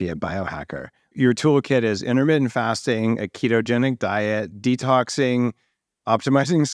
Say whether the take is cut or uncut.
cut